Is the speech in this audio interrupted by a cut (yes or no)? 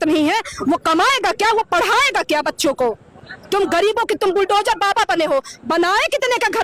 no